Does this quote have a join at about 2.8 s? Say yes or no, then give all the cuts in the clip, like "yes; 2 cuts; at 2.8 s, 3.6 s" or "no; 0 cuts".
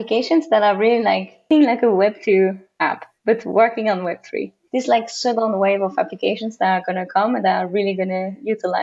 no; 2 cuts; at 1.5 s, 4.6 s